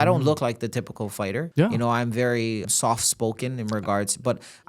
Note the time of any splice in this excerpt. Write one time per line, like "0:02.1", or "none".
0:01.5
0:02.6